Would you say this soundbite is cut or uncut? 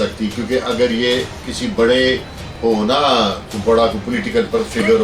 uncut